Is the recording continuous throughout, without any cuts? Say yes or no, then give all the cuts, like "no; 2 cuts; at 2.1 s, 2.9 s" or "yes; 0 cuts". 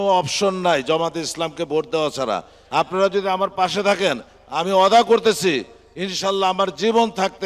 no; 1 cut; at 2.5 s